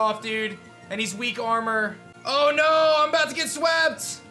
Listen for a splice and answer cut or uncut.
cut